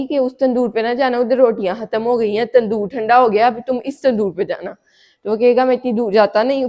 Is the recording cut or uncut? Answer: uncut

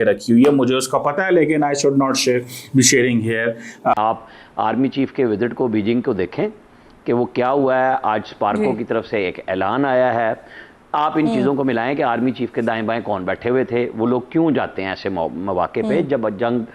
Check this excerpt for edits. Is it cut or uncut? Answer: cut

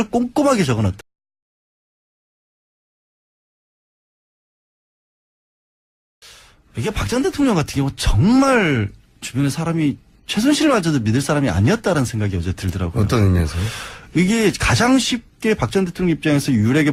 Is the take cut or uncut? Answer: uncut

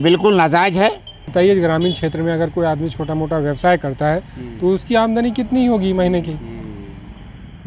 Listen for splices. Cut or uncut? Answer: cut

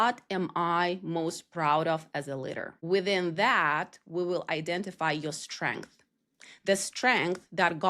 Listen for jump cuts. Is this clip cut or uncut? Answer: cut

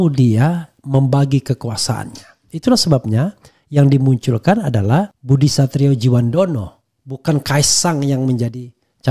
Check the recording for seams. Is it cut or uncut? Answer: cut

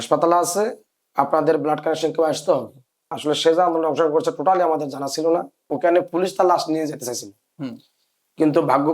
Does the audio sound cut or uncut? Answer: cut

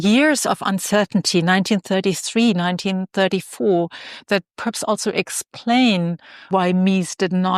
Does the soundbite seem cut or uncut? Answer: uncut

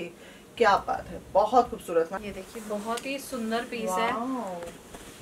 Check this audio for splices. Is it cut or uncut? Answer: cut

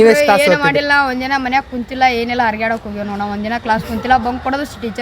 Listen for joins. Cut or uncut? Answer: uncut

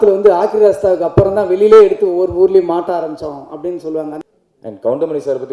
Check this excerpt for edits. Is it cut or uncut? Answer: cut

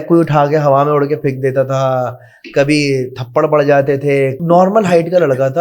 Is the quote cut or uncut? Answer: cut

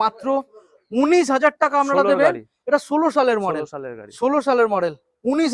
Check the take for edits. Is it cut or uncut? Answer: uncut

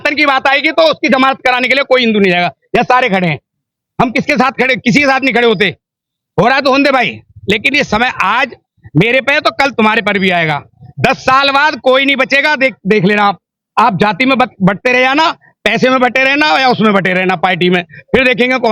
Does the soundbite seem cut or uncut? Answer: uncut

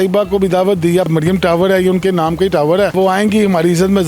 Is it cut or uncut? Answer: cut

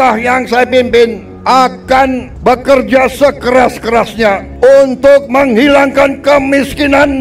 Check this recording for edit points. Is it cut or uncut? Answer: cut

